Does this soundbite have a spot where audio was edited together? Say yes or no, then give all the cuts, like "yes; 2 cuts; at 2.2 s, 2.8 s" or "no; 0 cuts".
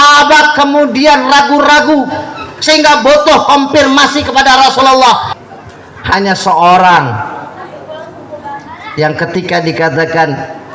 yes; 1 cut; at 5.3 s